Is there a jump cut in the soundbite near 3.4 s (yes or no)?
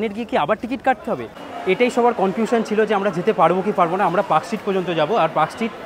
no